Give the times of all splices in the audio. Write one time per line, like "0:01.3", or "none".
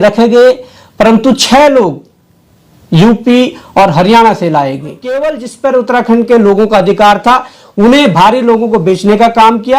0:05.5